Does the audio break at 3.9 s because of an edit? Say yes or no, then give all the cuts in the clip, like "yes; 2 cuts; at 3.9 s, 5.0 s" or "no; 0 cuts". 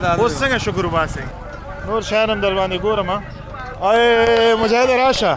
no; 1 cut; at 1.2 s